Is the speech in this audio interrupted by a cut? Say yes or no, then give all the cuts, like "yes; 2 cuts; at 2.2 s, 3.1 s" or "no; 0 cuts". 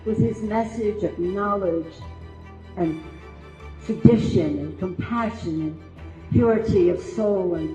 no; 0 cuts